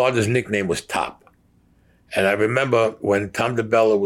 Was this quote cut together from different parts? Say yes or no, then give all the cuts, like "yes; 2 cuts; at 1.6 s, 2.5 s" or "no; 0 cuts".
no; 0 cuts